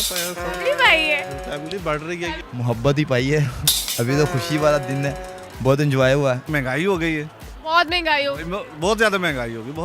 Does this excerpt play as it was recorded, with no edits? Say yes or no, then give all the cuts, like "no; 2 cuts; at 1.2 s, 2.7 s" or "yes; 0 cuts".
no; 2 cuts; at 2.4 s, 6.5 s